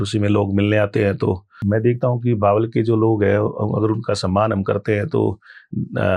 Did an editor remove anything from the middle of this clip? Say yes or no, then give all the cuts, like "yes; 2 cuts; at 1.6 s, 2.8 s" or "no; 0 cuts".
yes; 1 cut; at 1.5 s